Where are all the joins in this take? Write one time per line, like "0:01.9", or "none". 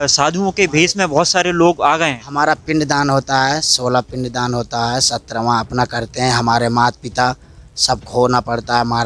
none